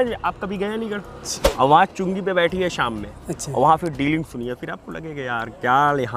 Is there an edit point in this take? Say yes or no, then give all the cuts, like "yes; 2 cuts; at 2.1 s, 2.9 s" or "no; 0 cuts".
yes; 1 cut; at 1.2 s